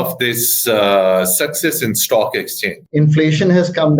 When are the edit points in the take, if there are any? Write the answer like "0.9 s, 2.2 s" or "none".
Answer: 2.7 s